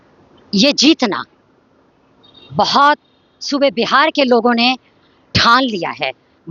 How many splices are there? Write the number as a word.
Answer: zero